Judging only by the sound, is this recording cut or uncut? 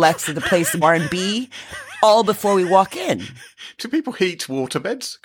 cut